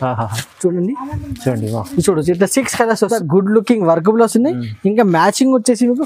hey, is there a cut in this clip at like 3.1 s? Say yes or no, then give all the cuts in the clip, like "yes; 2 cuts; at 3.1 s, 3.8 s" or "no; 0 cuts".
yes; 1 cut; at 3.1 s